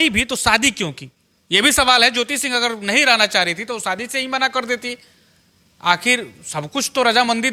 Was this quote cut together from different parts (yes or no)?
no